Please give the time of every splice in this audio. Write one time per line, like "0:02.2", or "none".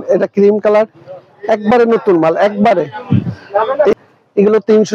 0:03.9